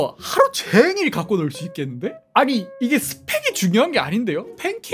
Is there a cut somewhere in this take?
yes; 1 cut; at 2.2 s

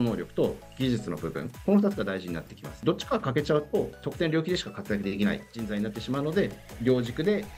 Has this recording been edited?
no; 0 cuts

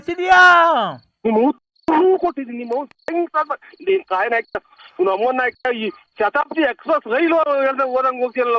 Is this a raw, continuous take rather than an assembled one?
yes; 0 cuts

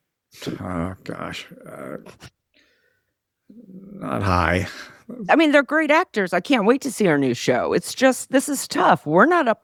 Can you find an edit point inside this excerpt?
no; 0 cuts

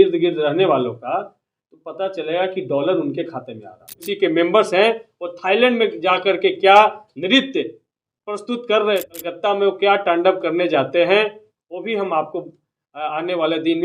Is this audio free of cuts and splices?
no; 2 cuts; at 4.1 s, 9.1 s

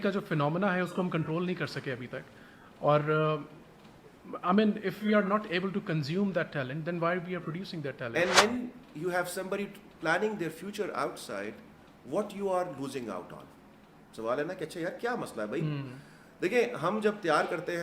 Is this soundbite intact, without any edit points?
no; 1 cut; at 8.1 s

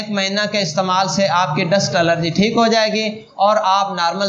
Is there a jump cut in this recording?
no; 0 cuts

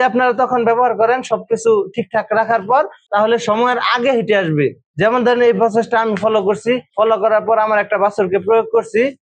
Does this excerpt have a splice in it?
no; 0 cuts

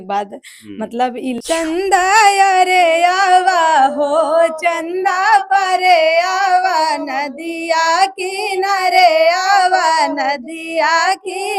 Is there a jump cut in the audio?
yes; 1 cut; at 1.4 s

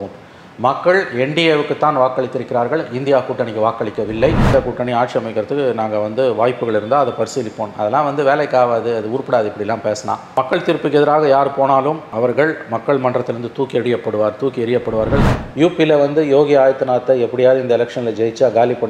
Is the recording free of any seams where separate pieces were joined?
no; 2 cuts; at 4.5 s, 15.2 s

